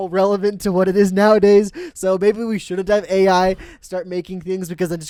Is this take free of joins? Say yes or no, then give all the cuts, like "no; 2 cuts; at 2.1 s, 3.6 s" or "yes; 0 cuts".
yes; 0 cuts